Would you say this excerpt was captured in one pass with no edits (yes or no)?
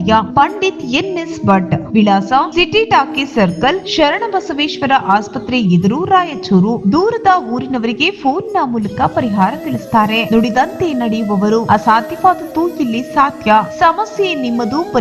yes